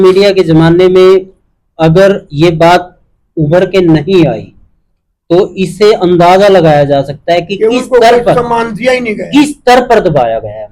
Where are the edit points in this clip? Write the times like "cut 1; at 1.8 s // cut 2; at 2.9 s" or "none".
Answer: none